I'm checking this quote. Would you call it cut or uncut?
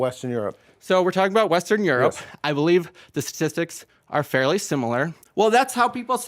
cut